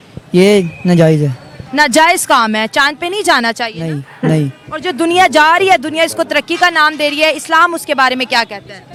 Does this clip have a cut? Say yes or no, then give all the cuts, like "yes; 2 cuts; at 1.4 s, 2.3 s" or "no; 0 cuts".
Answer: no; 0 cuts